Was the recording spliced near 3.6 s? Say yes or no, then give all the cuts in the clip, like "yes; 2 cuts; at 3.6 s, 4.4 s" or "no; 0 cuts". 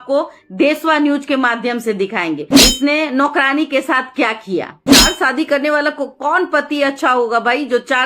no; 1 cut; at 4.8 s